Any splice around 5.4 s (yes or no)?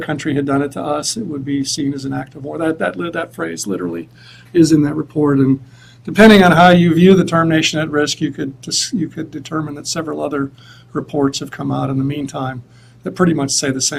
no